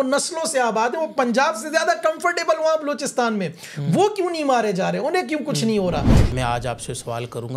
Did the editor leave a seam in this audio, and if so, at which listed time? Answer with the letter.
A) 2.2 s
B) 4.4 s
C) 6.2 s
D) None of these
C